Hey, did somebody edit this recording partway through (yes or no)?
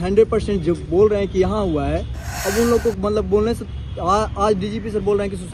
no